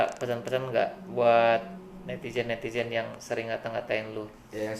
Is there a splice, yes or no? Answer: no